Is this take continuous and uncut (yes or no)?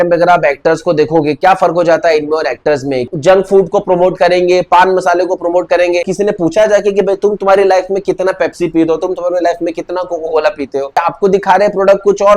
no